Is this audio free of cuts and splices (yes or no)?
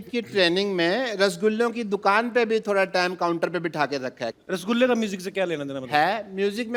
yes